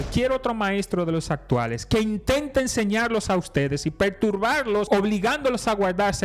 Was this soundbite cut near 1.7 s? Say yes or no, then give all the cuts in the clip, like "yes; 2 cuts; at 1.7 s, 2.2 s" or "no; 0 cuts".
no; 1 cut; at 4.9 s